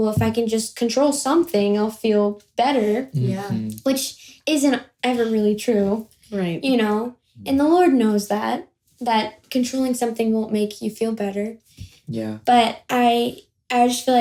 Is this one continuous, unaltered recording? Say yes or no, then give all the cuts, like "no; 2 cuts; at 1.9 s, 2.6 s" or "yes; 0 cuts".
yes; 0 cuts